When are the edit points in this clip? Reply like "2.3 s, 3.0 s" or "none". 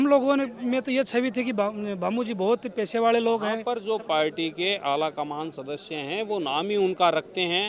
3.7 s